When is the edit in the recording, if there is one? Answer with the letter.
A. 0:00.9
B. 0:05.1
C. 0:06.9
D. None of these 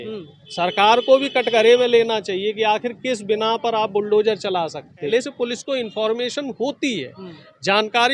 B